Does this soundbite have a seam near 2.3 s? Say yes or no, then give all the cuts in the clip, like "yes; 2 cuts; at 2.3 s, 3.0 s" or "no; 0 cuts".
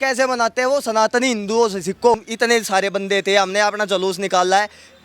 yes; 1 cut; at 2.3 s